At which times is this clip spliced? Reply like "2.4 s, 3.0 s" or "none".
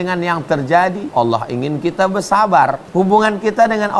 1.0 s, 2.8 s